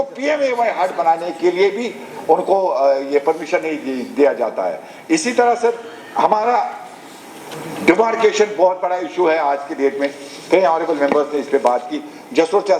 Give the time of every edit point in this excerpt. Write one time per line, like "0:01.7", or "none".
none